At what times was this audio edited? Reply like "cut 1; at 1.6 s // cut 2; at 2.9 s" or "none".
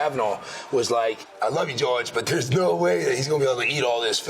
cut 1; at 1.3 s